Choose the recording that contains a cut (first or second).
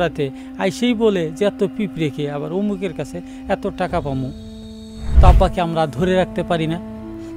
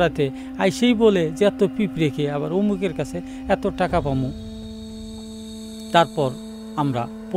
first